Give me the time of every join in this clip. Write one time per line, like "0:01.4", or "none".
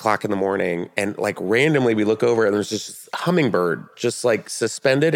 none